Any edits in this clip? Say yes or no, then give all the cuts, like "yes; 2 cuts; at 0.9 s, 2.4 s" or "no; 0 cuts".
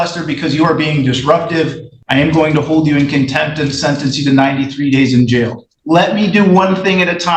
yes; 2 cuts; at 1.9 s, 5.7 s